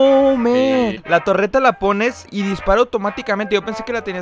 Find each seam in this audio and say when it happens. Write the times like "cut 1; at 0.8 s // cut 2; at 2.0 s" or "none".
cut 1; at 1.0 s // cut 2; at 2.3 s